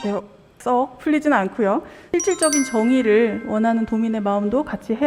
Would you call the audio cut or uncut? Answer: cut